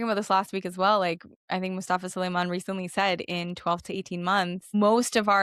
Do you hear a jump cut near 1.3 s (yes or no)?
yes